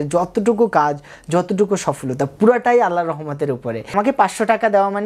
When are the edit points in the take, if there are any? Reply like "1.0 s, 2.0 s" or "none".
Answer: 3.9 s